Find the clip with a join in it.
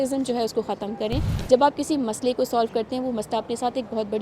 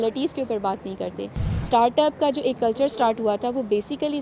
first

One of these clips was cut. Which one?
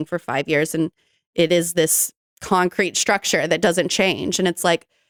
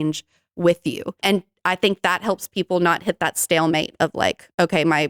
second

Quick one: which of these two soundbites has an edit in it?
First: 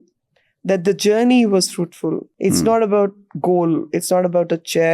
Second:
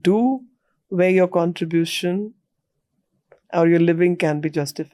first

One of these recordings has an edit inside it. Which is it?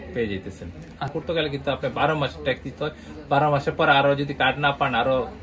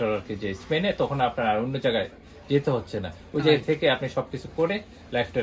first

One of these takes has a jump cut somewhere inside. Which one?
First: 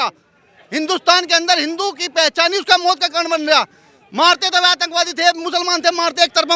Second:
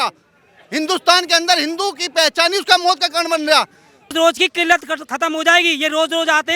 second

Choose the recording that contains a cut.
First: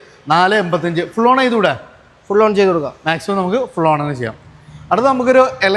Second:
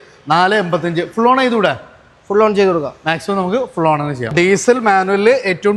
second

